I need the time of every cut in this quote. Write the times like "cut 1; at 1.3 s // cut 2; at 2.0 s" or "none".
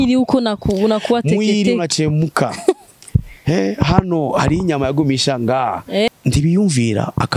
cut 1; at 6.1 s